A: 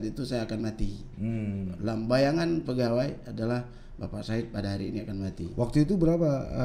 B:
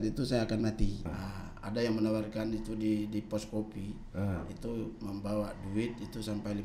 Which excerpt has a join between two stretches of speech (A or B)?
B